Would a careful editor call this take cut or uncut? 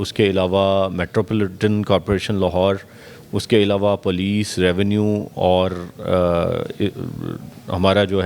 uncut